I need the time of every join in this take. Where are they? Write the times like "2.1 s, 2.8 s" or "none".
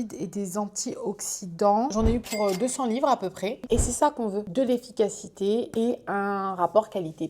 1.9 s, 3.7 s